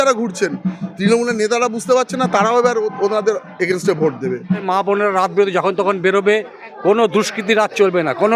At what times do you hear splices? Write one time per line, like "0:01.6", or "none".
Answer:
0:04.6